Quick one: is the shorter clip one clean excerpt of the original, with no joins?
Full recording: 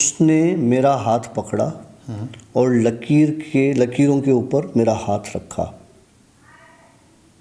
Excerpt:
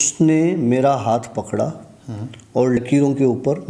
no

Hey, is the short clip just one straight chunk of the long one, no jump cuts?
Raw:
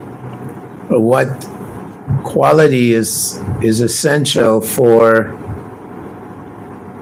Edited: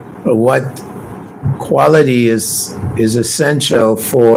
yes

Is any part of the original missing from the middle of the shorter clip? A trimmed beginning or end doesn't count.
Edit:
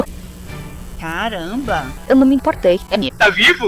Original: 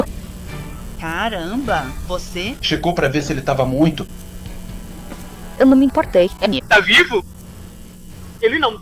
yes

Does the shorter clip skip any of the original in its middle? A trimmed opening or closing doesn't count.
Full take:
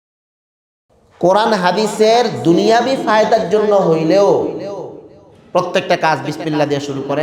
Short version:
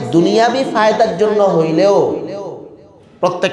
no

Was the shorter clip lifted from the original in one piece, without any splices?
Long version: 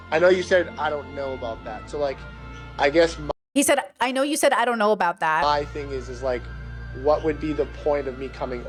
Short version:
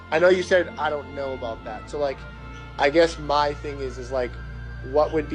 no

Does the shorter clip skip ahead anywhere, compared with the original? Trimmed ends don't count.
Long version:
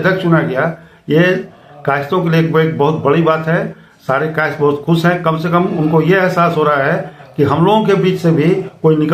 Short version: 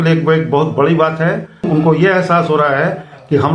yes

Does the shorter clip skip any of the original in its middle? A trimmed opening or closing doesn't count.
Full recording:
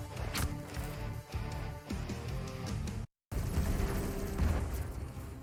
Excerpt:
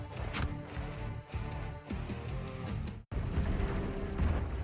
yes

